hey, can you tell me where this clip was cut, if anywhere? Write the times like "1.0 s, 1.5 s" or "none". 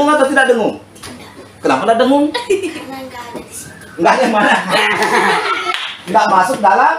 none